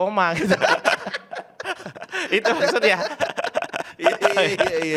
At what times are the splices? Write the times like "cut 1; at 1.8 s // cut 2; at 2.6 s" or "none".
none